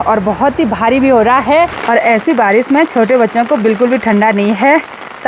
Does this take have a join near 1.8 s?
yes; 1 cut; at 1.8 s

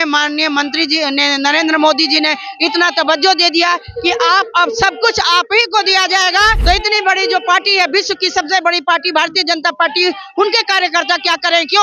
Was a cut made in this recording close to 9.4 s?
no; 1 cut; at 6.6 s

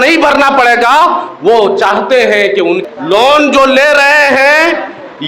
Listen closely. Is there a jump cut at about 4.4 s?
no; 1 cut; at 2.8 s

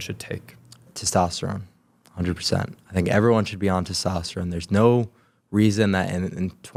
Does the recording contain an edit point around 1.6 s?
no; 0 cuts

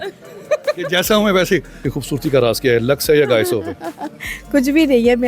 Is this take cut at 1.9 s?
yes; 1 cut; at 1.9 s

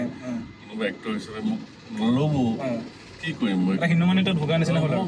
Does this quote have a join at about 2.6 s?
no; 0 cuts

